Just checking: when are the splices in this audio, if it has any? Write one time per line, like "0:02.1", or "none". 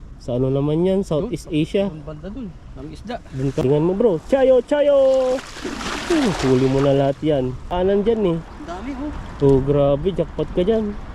0:03.6
0:07.7